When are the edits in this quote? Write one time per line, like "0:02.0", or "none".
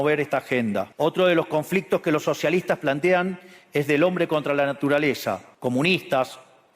0:00.9
0:05.5